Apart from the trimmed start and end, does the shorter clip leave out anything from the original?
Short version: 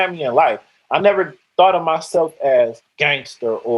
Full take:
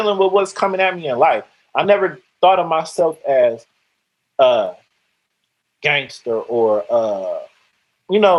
yes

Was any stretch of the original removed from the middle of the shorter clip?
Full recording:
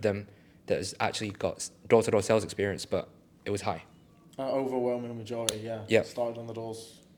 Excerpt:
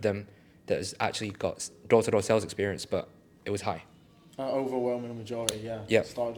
no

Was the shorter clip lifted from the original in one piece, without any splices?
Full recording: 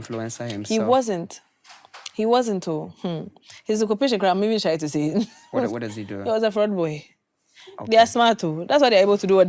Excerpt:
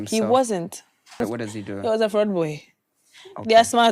no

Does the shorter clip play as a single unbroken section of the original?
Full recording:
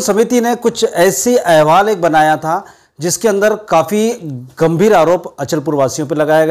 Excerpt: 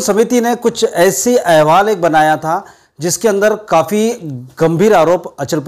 yes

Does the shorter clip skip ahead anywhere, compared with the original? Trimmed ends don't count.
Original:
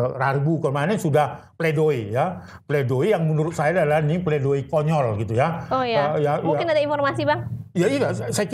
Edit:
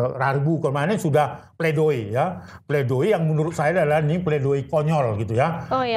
no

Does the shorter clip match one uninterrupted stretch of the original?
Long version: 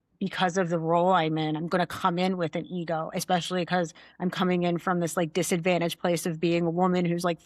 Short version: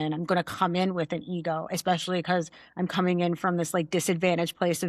yes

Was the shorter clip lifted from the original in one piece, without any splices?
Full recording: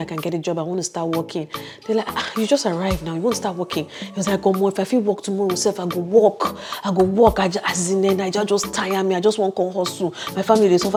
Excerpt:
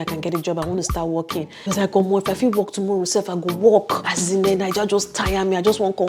no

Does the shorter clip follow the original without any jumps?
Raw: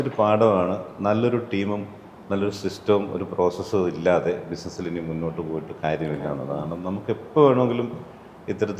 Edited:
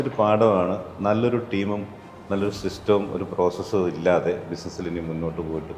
yes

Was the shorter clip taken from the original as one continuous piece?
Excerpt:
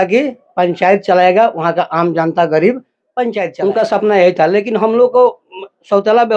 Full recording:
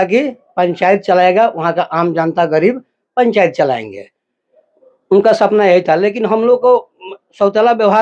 no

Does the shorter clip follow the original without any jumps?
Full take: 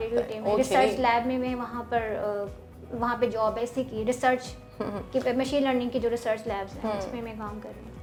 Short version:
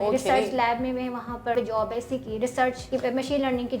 no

